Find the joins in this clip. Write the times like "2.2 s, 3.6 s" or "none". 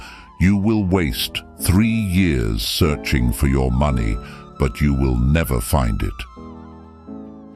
none